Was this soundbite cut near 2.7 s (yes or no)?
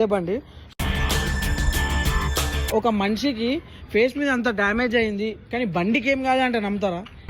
yes